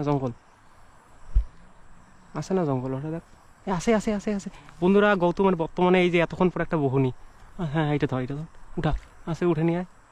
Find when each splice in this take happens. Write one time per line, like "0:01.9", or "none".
none